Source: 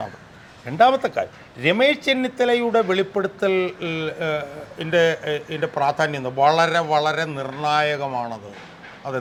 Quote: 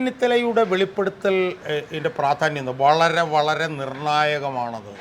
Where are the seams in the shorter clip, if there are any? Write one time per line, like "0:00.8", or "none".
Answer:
0:01.6